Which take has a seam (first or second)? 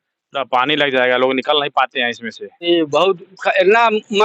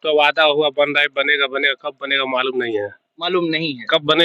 first